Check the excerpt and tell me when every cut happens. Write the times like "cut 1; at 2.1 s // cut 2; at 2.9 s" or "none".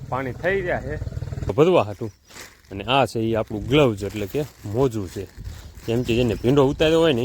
cut 1; at 1.5 s